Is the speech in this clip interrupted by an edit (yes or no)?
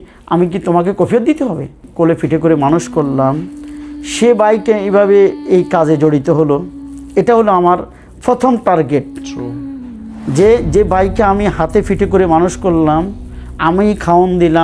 yes